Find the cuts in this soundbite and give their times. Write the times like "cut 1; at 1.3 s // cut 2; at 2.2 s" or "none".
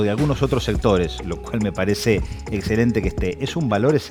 none